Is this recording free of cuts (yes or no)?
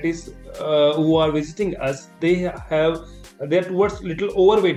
yes